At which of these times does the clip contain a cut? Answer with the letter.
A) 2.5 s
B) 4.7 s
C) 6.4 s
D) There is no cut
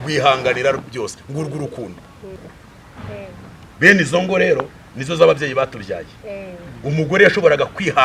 A